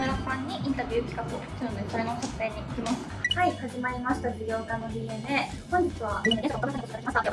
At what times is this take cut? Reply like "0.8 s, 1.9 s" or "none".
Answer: none